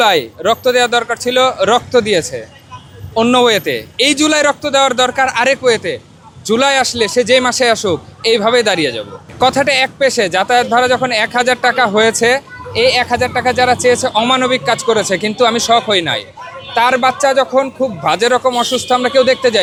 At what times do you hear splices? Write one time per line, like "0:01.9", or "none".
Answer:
none